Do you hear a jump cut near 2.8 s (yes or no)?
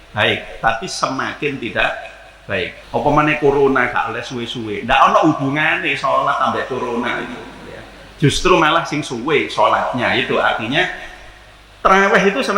yes